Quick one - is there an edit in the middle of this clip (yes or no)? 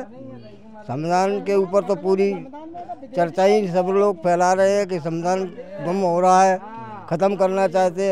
no